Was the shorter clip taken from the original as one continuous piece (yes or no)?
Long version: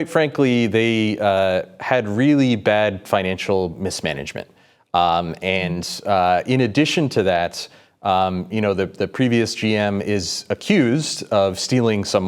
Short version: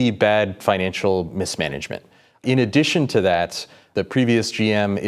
no